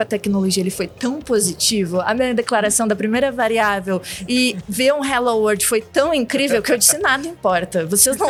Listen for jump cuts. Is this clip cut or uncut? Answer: uncut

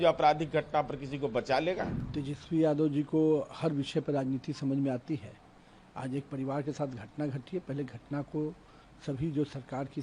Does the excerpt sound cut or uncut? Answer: cut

